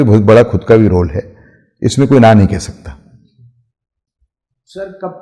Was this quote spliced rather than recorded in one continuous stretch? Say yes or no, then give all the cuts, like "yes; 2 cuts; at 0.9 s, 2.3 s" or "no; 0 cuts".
no; 0 cuts